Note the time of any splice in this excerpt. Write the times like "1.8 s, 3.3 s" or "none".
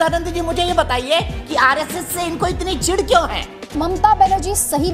3.8 s